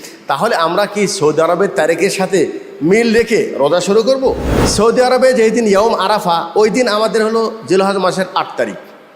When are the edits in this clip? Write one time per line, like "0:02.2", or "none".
0:04.5

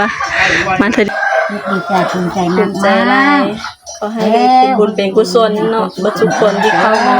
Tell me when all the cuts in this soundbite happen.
0:01.1

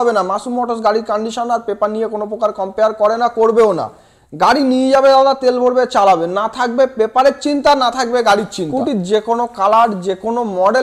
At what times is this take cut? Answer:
0:08.6

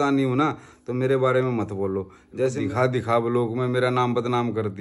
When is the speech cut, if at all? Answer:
0:02.5

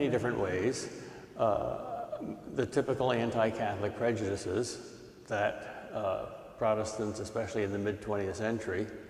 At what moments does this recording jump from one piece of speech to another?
0:06.6

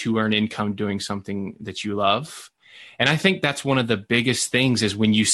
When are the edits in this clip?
0:02.5

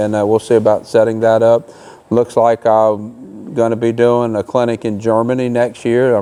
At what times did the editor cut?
none

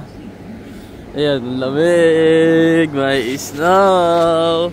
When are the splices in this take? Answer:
none

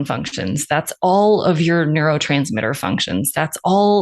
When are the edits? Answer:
none

